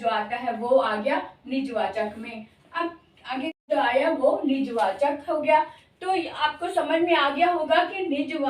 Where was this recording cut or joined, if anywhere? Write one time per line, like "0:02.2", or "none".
0:03.6